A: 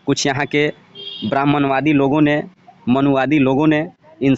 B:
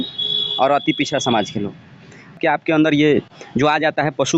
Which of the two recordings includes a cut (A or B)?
B